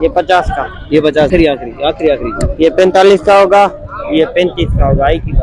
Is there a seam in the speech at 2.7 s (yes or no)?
no